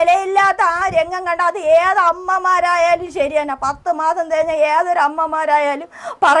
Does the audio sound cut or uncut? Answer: uncut